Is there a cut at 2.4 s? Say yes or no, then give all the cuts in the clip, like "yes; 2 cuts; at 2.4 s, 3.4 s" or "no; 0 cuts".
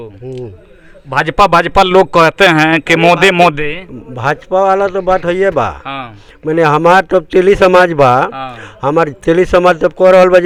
no; 0 cuts